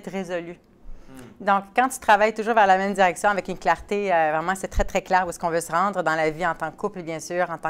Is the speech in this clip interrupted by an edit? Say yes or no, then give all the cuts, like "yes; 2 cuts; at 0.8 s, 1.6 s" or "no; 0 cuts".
no; 0 cuts